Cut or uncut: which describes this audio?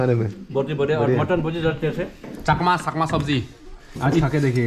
cut